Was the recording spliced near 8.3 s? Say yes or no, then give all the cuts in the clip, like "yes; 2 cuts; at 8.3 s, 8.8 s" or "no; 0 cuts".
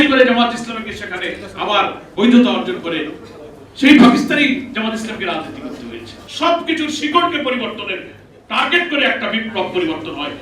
no; 2 cuts; at 2.0 s, 6.2 s